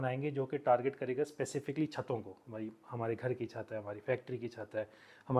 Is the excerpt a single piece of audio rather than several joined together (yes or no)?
yes